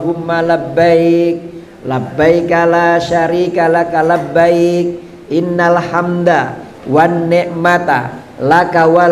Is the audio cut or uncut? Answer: uncut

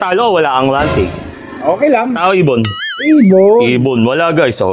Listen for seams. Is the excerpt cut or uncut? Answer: uncut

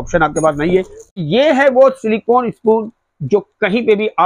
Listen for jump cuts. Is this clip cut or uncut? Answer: cut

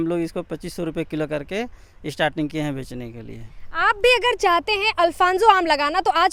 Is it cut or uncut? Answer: uncut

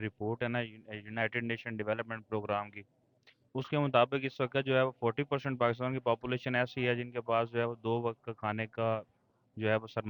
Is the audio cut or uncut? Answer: uncut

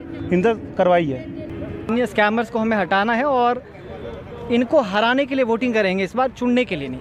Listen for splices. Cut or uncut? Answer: cut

